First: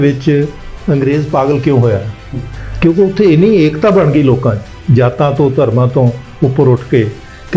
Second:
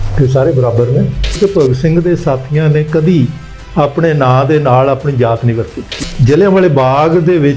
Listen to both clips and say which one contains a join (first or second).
second